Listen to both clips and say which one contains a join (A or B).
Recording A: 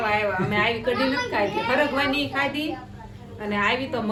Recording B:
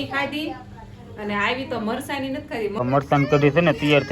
B